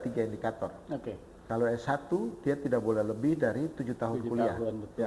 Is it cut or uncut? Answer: cut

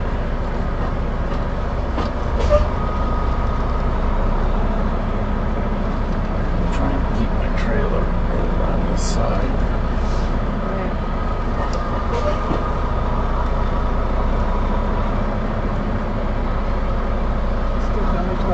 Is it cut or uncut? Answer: uncut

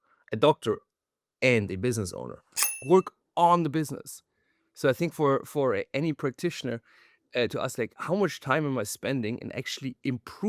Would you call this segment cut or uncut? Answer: cut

